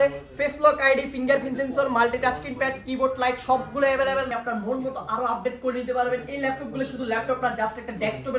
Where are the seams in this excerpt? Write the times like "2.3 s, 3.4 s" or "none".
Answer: 4.3 s

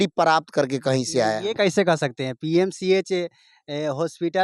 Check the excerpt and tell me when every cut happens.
none

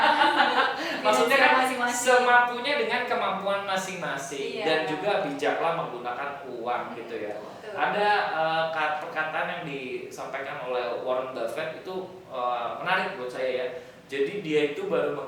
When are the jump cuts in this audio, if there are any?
none

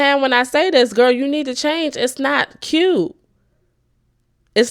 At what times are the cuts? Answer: none

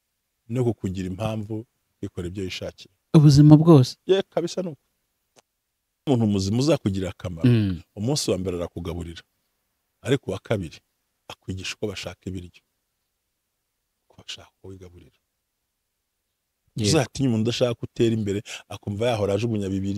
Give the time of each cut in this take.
6.1 s

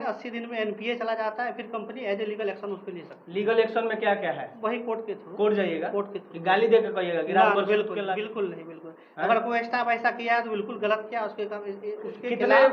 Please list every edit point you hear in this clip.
8.0 s

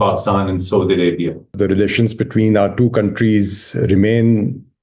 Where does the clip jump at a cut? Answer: 1.5 s

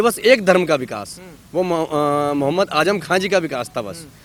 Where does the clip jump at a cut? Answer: none

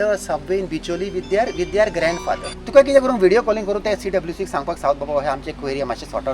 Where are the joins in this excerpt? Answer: 2.5 s

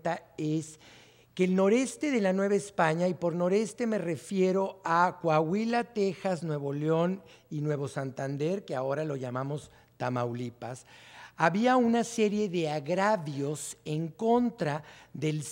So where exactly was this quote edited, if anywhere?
7.1 s

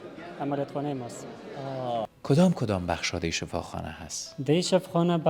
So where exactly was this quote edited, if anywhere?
2.0 s

